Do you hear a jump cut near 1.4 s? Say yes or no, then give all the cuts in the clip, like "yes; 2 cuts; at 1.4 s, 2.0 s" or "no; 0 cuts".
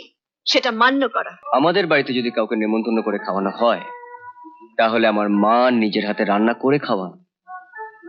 yes; 1 cut; at 1.4 s